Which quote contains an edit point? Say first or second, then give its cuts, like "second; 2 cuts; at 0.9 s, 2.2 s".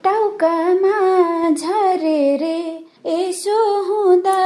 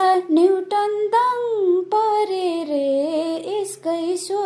first; 1 cut; at 2.9 s